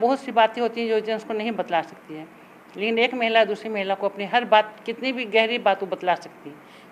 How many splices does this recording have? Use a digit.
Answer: 0